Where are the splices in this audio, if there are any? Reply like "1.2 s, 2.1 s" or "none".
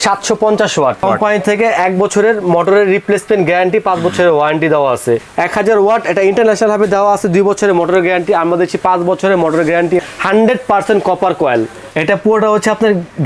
1.0 s, 5.3 s, 10.0 s, 11.9 s